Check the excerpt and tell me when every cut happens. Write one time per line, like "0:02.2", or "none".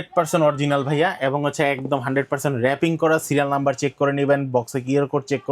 none